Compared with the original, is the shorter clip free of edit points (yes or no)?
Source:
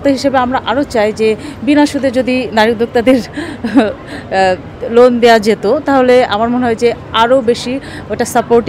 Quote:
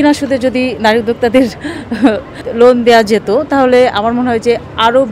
no